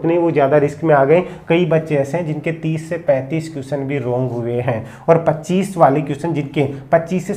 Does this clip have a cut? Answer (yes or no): no